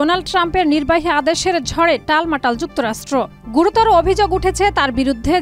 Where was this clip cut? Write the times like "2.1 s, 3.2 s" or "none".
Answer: none